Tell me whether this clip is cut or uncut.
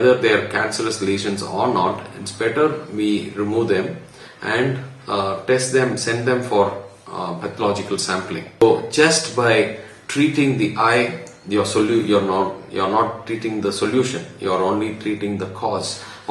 cut